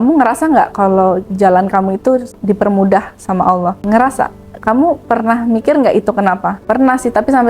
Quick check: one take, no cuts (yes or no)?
no